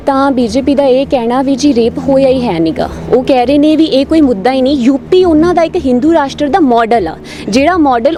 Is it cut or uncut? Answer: uncut